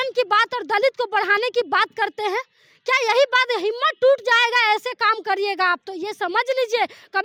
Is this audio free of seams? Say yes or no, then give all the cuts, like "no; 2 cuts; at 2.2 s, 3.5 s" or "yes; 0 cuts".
yes; 0 cuts